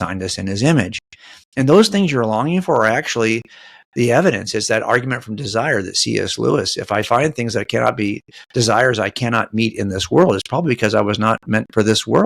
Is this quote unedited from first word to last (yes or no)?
yes